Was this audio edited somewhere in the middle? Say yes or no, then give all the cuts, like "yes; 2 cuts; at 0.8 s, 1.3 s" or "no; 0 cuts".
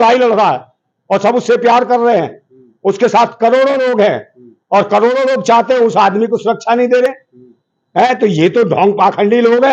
no; 0 cuts